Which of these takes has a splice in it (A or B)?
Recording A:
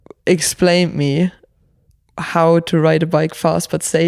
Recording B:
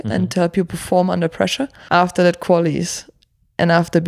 B